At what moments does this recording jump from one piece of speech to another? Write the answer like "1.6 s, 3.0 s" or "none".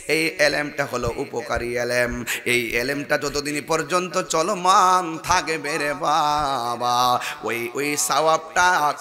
none